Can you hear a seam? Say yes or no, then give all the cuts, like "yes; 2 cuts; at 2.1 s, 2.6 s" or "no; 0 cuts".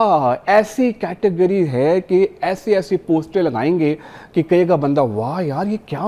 no; 0 cuts